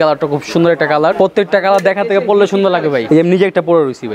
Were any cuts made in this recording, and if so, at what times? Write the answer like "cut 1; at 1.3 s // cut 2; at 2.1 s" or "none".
cut 1; at 1.1 s // cut 2; at 3.0 s